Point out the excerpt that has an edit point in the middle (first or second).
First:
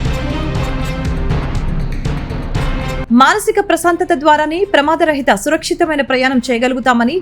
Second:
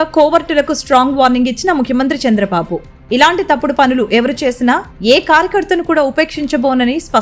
first